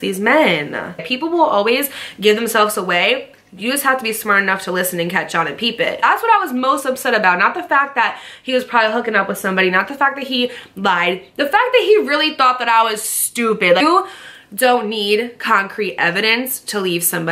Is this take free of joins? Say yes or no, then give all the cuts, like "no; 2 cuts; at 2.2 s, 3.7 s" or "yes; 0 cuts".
no; 3 cuts; at 1.0 s, 6.0 s, 13.8 s